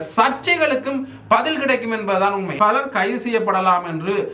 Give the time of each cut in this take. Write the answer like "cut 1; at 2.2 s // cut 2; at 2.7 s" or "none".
cut 1; at 2.5 s